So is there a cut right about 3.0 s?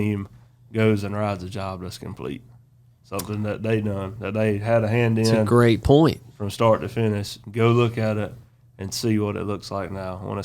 no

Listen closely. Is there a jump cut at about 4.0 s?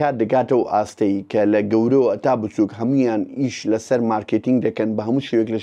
no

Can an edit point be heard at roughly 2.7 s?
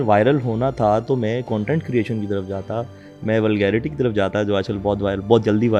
no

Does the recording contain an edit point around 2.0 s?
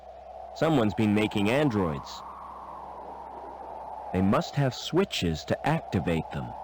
yes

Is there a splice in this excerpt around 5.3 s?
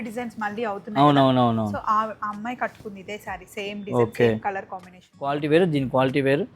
yes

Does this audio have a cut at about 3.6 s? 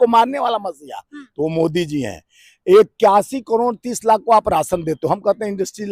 no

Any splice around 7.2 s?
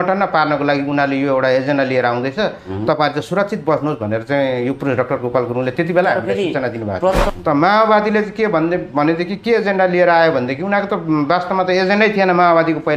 yes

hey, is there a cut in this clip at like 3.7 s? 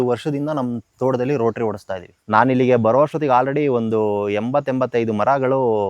no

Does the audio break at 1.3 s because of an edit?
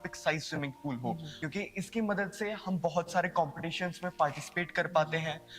yes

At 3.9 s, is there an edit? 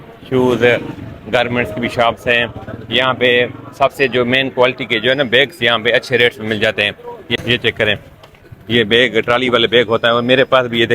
no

